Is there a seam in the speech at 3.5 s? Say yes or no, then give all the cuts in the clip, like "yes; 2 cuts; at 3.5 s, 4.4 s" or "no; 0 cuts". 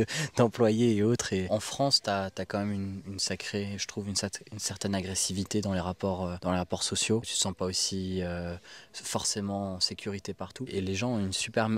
no; 4 cuts; at 1.5 s, 6.4 s, 7.3 s, 10.7 s